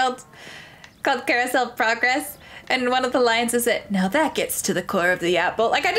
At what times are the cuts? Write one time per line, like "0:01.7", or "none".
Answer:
none